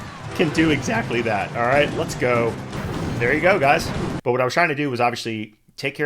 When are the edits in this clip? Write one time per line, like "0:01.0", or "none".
0:02.7
0:04.1